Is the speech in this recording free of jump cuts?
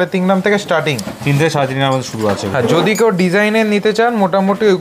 yes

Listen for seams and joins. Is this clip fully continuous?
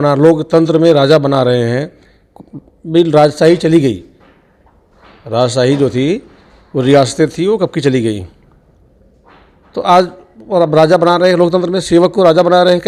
yes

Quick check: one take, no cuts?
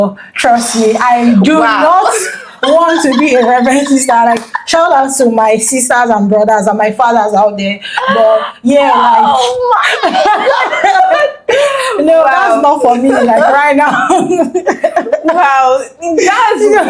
yes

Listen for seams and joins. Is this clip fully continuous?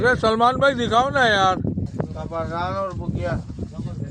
no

